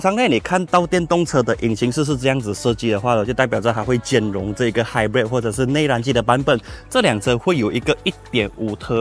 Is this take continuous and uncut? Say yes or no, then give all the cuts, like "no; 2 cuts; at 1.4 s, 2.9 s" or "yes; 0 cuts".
yes; 0 cuts